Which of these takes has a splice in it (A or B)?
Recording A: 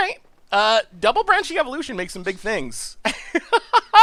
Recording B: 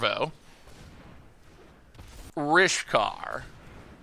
B